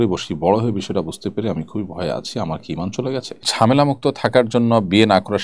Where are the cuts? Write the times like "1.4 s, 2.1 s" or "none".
3.3 s

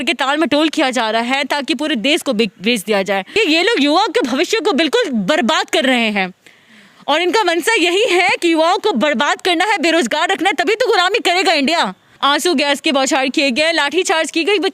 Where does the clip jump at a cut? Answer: 3.4 s, 12.0 s

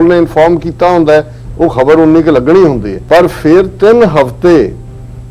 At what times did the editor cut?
2.9 s

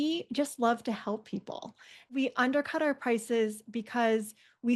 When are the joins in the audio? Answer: 2.1 s

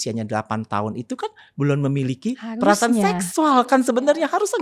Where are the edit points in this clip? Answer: none

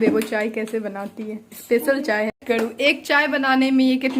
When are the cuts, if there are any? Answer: 2.4 s

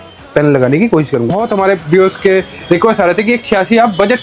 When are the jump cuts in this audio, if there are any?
1.3 s

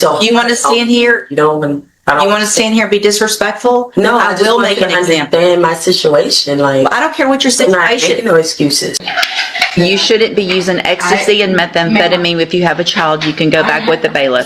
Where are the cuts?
9.0 s

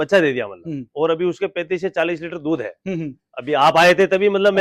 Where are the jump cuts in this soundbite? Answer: none

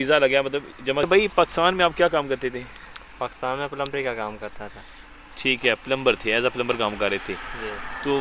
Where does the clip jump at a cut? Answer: 1.1 s

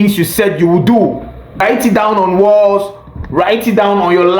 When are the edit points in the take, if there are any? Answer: 1.6 s

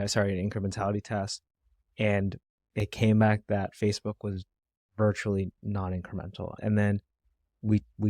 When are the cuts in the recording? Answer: 6.6 s

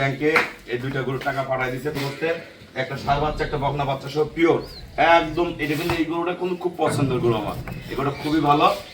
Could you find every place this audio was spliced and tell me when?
1.9 s

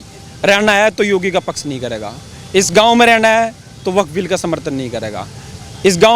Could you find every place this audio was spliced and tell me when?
none

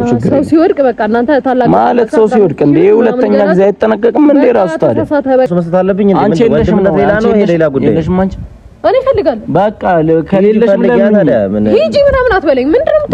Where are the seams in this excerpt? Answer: 5.5 s

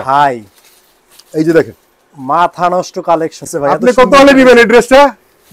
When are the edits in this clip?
3.5 s

